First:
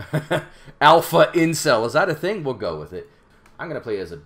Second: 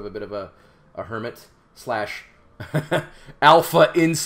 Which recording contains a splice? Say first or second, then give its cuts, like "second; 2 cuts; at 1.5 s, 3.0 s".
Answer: first; 1 cut; at 3.2 s